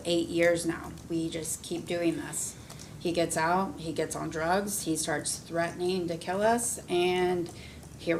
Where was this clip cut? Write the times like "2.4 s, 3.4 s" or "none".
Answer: none